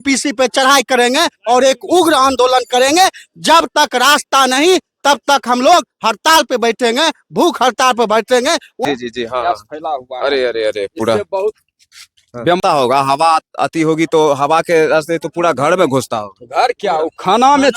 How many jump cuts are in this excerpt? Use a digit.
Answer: 2